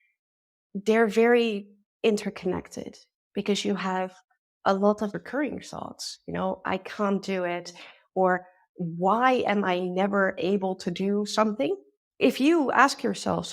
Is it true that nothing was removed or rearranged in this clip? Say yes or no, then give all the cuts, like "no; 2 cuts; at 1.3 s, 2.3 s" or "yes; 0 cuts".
no; 2 cuts; at 5.1 s, 12.0 s